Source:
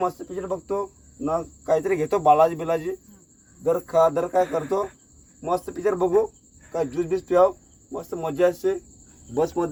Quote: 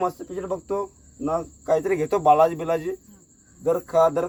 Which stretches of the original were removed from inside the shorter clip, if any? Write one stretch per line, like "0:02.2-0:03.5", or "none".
none